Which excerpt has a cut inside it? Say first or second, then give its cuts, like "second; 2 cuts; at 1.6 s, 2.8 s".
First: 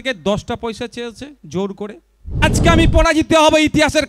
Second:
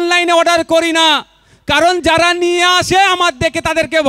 first; 1 cut; at 2.4 s